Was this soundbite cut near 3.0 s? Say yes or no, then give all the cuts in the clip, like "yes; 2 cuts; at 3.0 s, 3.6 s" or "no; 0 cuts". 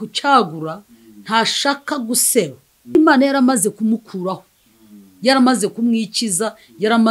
yes; 1 cut; at 3.0 s